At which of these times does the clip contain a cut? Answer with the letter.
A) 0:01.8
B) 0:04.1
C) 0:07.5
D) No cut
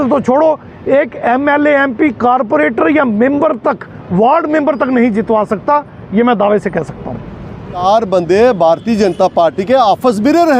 C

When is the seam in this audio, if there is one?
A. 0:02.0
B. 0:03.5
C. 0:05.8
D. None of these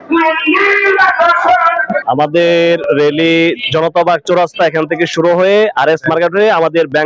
A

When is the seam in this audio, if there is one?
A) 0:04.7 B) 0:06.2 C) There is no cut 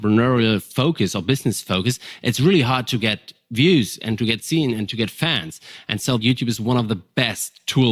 B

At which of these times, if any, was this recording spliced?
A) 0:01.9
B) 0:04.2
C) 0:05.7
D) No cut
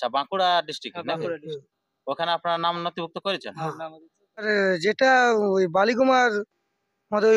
B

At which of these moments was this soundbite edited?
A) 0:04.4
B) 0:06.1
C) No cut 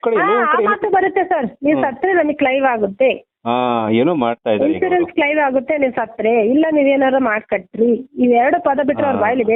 C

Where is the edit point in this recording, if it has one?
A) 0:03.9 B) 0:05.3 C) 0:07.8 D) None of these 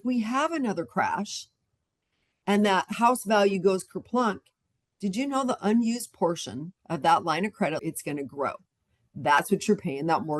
C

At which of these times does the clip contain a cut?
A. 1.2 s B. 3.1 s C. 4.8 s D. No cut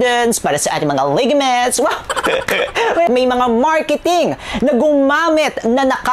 B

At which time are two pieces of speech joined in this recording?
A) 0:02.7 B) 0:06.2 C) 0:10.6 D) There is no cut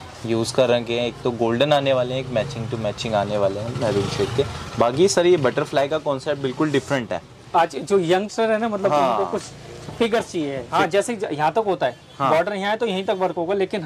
C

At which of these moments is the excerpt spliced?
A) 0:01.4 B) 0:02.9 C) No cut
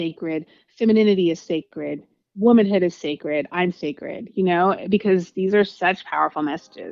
C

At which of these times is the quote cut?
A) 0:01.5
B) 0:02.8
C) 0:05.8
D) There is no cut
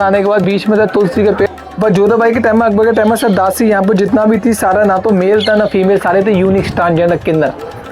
A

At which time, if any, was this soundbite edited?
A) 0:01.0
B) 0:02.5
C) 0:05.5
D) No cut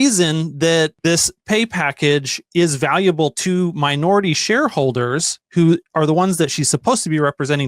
A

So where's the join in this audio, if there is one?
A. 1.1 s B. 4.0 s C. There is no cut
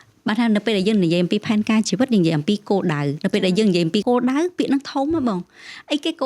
B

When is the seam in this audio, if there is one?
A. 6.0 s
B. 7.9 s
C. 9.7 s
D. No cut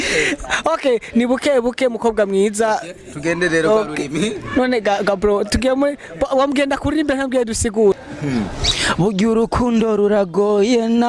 B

